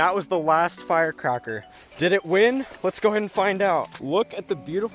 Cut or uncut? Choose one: cut